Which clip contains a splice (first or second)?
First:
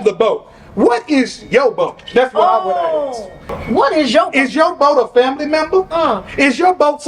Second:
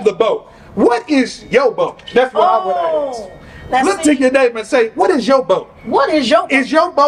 first